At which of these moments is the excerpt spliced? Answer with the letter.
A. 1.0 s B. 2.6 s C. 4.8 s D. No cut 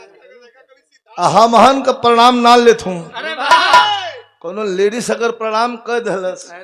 D